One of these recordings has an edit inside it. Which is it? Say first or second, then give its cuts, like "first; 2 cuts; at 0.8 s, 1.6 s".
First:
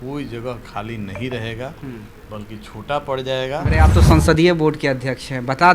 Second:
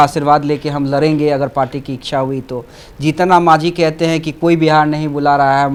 first; 1 cut; at 3.7 s